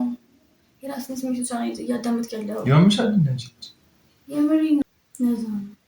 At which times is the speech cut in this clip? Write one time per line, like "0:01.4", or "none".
0:04.8